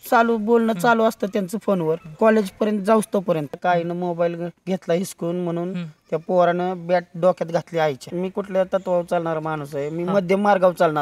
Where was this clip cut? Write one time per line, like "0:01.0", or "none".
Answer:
0:03.6
0:08.2